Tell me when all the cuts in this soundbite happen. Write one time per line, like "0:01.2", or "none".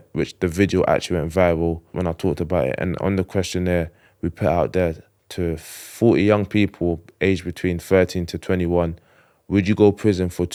none